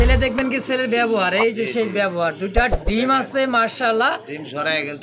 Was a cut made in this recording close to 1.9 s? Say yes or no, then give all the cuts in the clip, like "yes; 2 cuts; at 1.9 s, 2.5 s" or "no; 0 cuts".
no; 0 cuts